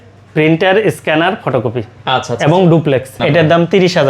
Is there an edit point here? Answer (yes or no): yes